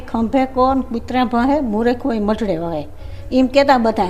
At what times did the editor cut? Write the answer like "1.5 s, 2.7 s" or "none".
none